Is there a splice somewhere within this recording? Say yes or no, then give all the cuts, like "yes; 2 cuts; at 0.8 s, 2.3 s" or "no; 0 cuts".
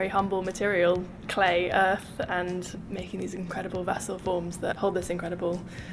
no; 0 cuts